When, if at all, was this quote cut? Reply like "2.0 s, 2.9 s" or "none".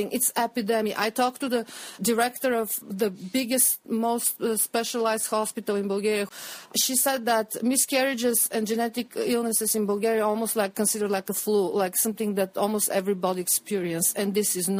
6.3 s